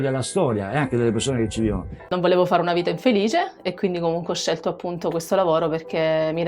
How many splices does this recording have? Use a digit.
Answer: 1